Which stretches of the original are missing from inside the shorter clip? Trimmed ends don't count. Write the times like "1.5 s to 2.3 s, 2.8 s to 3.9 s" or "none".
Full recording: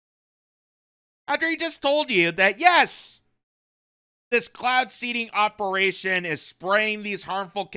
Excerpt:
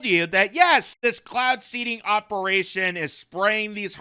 3.0 s to 4.2 s